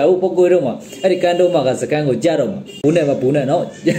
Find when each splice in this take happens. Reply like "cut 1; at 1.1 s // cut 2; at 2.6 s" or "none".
cut 1; at 2.8 s